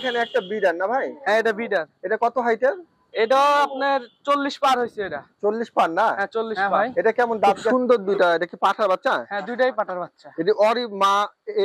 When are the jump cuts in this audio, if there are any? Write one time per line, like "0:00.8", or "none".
0:07.7